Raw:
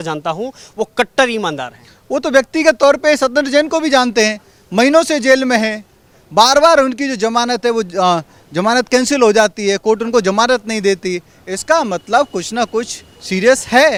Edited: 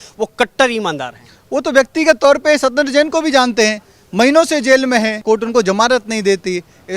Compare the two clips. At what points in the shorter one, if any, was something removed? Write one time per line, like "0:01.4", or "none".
0:05.2